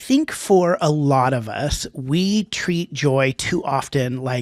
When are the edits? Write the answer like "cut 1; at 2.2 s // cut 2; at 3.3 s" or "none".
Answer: none